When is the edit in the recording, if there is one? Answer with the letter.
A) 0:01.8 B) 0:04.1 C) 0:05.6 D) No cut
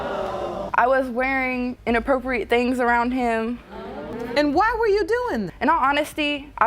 B